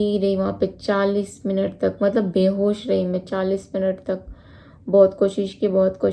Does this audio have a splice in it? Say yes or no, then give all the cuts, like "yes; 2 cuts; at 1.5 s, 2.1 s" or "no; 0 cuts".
no; 0 cuts